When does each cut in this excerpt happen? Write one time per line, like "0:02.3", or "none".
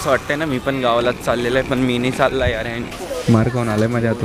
0:02.9

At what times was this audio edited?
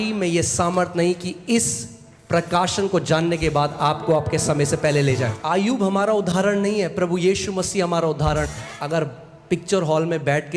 0:05.4
0:08.7

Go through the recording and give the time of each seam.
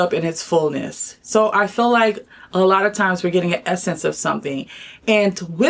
none

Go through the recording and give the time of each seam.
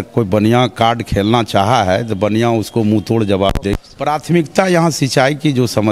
0:03.9

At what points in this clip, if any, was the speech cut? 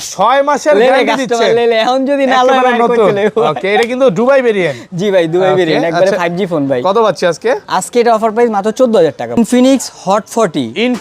0:09.4

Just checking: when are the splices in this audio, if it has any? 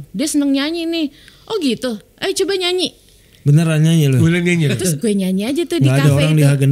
0:04.8

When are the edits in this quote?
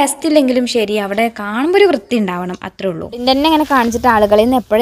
0:03.2

